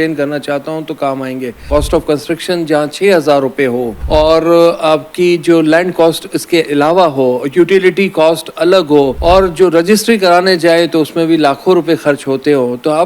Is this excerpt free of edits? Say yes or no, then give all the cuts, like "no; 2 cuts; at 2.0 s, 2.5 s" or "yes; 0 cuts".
no; 3 cuts; at 1.6 s, 3.9 s, 9.2 s